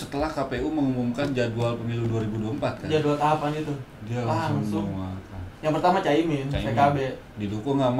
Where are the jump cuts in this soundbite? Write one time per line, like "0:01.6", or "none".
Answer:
none